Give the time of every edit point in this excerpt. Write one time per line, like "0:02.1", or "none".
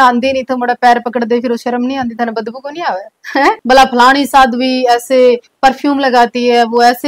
0:03.6